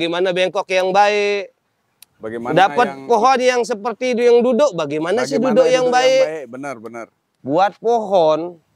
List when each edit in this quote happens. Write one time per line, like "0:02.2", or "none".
0:07.3